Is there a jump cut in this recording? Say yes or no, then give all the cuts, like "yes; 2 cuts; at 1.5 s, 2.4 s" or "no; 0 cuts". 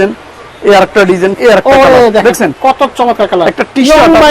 yes; 1 cut; at 1.4 s